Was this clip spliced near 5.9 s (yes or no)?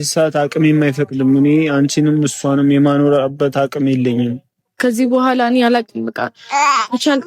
no